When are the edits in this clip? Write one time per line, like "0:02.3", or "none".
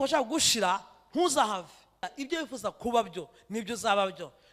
0:02.1